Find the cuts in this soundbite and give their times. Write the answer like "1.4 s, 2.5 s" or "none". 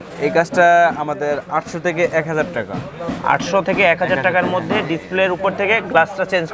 none

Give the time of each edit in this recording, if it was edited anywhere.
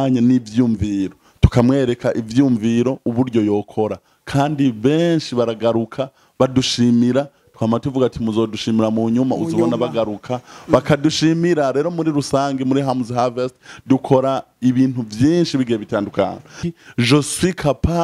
16.6 s

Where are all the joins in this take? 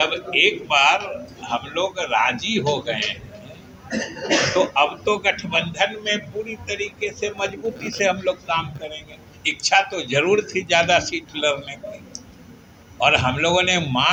none

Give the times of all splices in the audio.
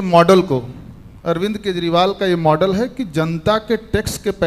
none

